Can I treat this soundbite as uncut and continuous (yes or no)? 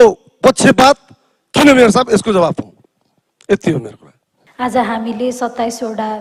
yes